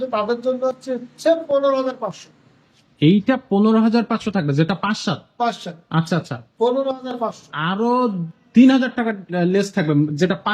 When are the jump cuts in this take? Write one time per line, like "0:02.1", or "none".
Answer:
none